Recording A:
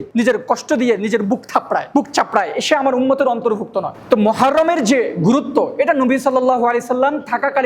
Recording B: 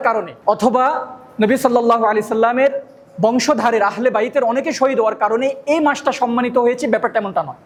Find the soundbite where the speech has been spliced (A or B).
A